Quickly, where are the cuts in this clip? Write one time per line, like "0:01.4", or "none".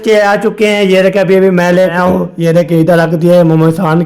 0:02.1